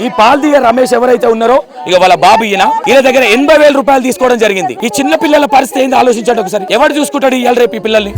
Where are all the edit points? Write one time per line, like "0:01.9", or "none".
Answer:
0:02.8
0:04.7
0:06.7